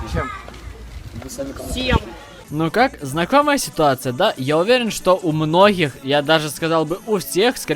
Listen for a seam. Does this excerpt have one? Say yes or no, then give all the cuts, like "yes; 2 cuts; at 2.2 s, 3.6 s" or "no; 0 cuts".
no; 0 cuts